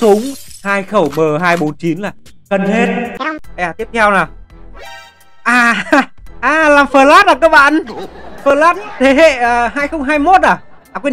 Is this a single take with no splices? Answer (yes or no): yes